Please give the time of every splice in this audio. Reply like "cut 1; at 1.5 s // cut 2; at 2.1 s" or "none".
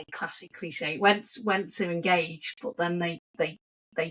none